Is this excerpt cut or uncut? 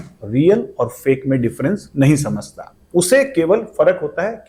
uncut